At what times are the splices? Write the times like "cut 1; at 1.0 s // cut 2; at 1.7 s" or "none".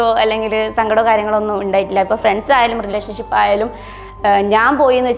none

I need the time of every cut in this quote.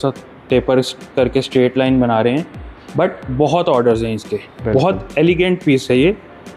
none

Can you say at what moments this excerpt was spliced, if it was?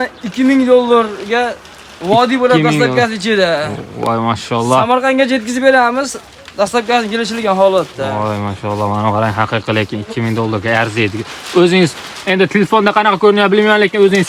none

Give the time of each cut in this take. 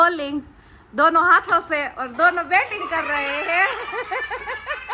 none

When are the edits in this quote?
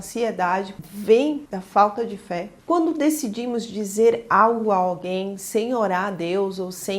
cut 1; at 2.5 s

